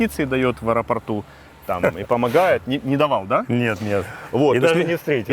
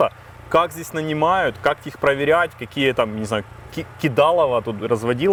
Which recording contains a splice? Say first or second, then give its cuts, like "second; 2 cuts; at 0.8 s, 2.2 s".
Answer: first; 1 cut; at 4.2 s